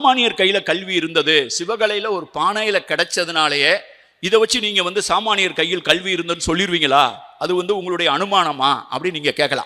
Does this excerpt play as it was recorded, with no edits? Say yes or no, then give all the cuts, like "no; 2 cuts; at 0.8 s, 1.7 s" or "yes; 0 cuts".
yes; 0 cuts